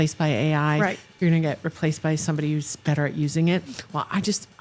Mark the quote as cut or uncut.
uncut